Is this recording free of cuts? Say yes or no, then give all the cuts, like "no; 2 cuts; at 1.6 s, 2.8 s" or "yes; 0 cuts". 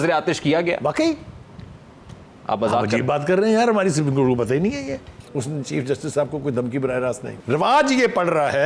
no; 2 cuts; at 5.1 s, 7.3 s